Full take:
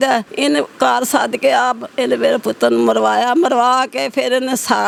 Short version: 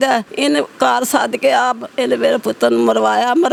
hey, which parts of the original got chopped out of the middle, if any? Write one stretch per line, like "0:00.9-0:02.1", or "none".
none